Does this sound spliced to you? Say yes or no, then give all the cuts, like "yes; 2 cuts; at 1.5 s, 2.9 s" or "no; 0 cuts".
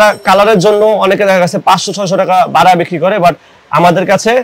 no; 0 cuts